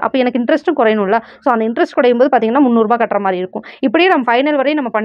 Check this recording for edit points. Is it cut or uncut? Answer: uncut